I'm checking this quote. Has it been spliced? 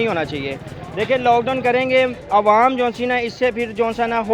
no; 0 cuts

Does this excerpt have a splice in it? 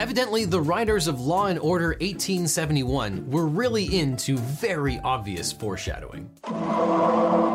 no; 0 cuts

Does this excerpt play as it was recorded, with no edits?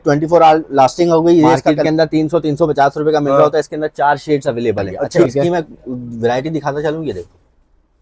no; 2 cuts; at 1.7 s, 5.3 s

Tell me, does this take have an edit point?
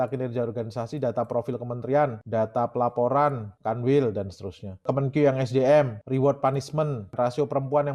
yes; 5 cuts; at 2.2 s, 3.5 s, 4.9 s, 6.0 s, 7.1 s

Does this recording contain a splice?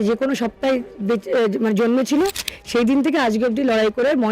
no; 0 cuts

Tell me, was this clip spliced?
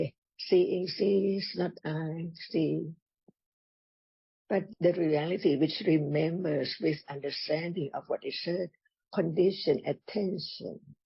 no; 0 cuts

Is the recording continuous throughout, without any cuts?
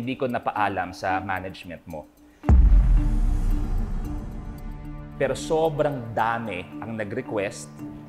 yes; 0 cuts

